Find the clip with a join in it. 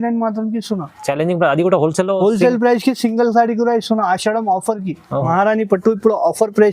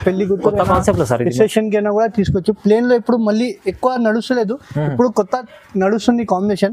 first; 1 cut; at 5.3 s

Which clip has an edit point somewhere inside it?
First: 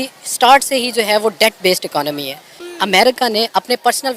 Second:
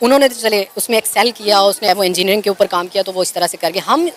first; 1 cut; at 2.5 s

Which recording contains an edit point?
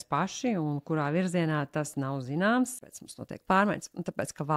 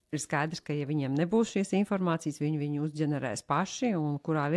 first; 1 cut; at 2.8 s

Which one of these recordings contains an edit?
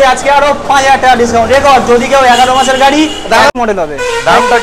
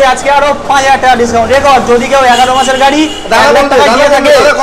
first; 1 cut; at 3.5 s

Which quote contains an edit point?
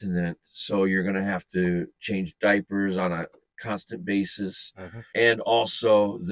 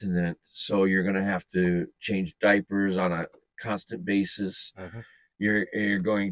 first; 1 cut; at 5.1 s

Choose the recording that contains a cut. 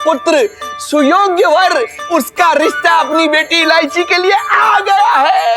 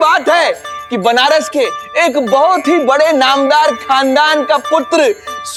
first; 1 cut; at 2.0 s

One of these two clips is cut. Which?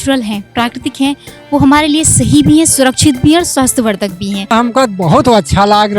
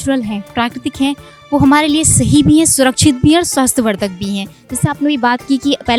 first; 1 cut; at 4.5 s

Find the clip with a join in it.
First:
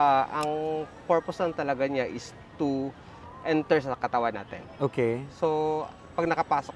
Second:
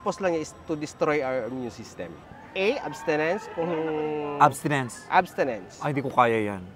second; 1 cut; at 2.2 s

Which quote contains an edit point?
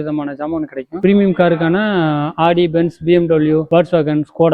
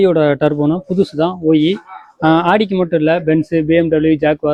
first; 1 cut; at 0.9 s

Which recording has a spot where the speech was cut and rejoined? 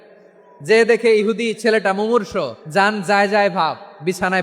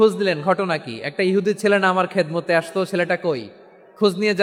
first; 1 cut; at 2.6 s

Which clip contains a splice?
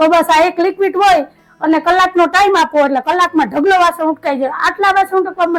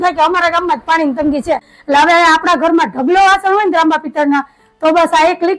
second; 1 cut; at 1.7 s

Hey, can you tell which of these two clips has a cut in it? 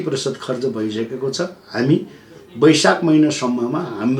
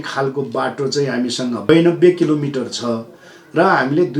second; 1 cut; at 1.7 s

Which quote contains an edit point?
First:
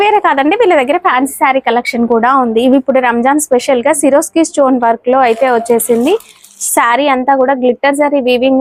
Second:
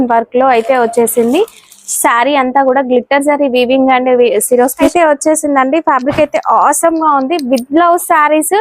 second; 1 cut; at 4.9 s

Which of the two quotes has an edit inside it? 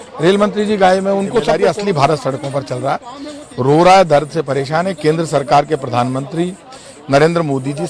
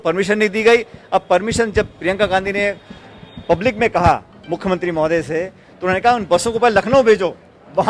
first; 1 cut; at 1.5 s

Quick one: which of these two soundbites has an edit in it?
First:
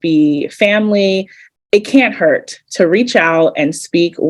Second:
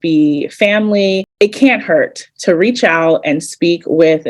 second; 1 cut; at 1.3 s

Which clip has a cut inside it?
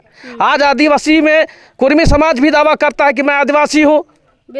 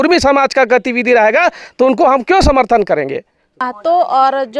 second; 1 cut; at 3.6 s

